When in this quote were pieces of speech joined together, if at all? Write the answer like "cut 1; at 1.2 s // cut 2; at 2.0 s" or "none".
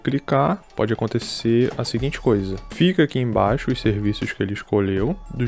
none